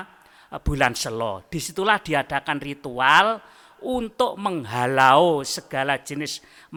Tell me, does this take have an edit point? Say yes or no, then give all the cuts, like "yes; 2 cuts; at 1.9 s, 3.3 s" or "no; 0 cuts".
no; 0 cuts